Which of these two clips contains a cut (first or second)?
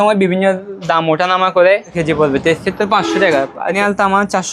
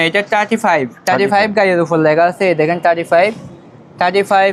first